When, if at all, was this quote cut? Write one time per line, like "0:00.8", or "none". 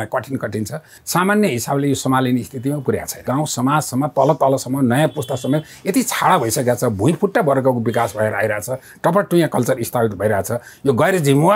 0:01.0
0:03.2